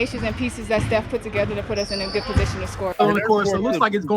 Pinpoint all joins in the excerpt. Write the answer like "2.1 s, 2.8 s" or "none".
2.9 s